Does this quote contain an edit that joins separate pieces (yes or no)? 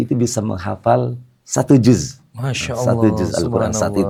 no